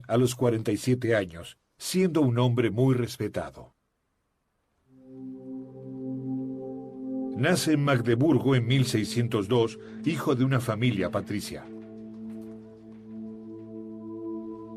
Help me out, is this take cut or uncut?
cut